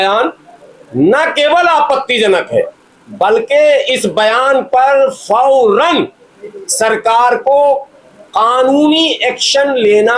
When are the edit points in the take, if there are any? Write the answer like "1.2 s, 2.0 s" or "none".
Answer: none